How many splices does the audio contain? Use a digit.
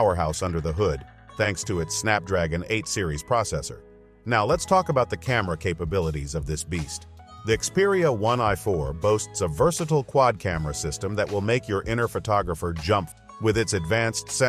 1